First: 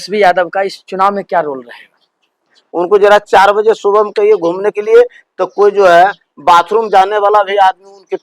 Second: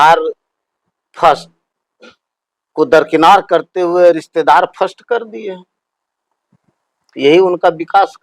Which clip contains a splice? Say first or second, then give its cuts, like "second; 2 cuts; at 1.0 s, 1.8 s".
first; 1 cut; at 2.6 s